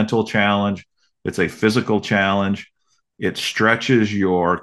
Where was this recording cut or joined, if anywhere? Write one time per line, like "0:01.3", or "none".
none